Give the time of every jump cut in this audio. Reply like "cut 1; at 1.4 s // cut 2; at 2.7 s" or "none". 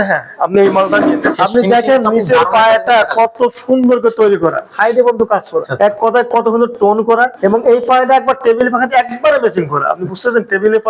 cut 1; at 1.3 s // cut 2; at 4.6 s // cut 3; at 5.7 s // cut 4; at 7.3 s